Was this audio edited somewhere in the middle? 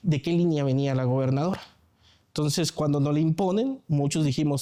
no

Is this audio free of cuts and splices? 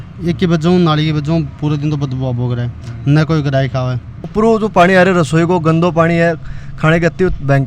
no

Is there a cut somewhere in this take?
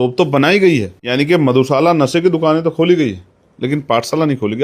yes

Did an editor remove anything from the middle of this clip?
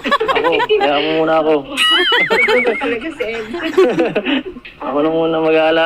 no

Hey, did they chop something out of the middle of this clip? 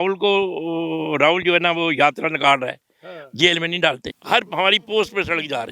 yes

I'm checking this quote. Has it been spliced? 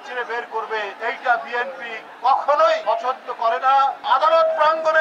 yes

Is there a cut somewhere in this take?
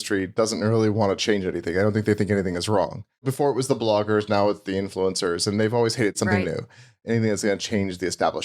yes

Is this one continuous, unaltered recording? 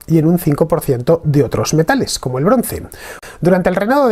yes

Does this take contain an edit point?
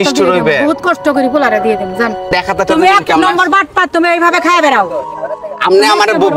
yes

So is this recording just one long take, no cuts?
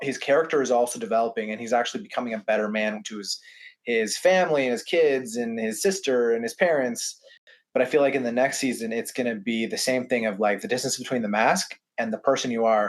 no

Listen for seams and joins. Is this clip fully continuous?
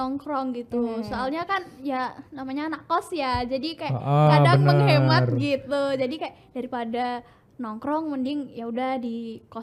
yes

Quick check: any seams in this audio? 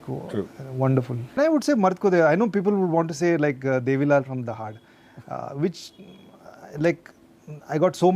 yes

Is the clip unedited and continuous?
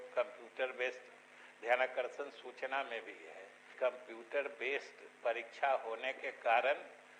yes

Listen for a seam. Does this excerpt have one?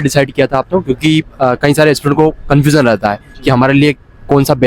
no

